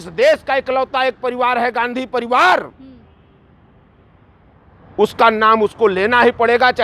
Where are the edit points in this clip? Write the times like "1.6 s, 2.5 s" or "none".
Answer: none